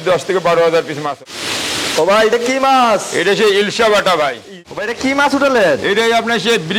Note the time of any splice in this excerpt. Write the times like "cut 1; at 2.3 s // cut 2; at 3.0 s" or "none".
cut 1; at 1.1 s // cut 2; at 4.5 s